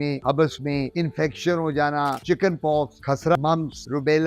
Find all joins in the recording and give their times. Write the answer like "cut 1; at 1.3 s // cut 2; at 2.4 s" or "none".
cut 1; at 2.2 s // cut 2; at 3.3 s